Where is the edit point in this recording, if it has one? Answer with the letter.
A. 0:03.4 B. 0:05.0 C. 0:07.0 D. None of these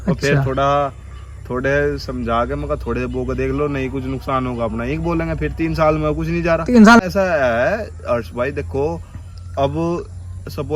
C